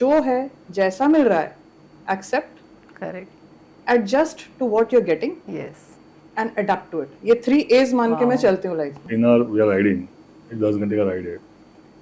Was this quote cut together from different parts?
yes; 1 cut; at 9.0 s

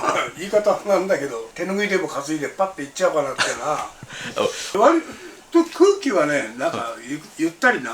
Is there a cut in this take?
yes; 2 cuts; at 1.5 s, 4.6 s

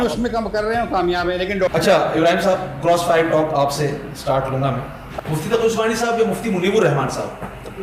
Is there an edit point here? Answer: yes; 2 cuts; at 1.7 s, 5.1 s

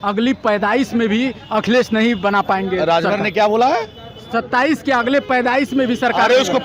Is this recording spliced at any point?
no; 0 cuts

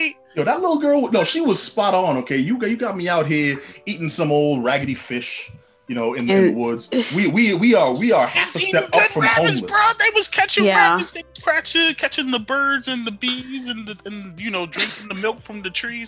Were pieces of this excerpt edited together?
no; 0 cuts

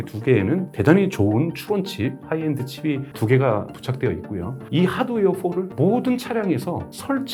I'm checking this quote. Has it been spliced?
no; 0 cuts

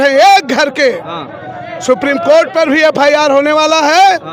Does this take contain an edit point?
no; 0 cuts

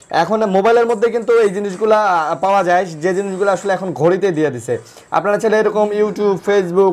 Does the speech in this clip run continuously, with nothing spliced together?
yes; 0 cuts

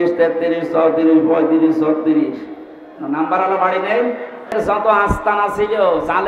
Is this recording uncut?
no; 1 cut; at 4.6 s

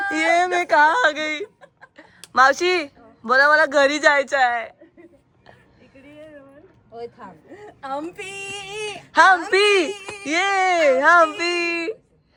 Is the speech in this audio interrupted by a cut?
no; 0 cuts

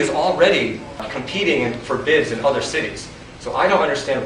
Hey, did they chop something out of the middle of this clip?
yes; 1 cut; at 1.1 s

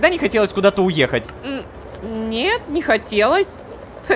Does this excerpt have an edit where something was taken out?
no; 0 cuts

